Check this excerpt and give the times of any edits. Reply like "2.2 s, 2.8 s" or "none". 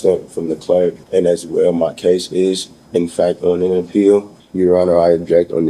1.0 s, 4.4 s